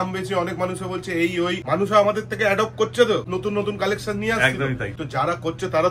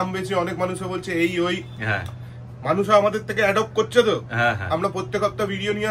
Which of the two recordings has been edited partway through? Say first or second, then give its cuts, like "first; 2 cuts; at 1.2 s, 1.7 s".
first; 3 cuts; at 1.6 s, 3.3 s, 4.9 s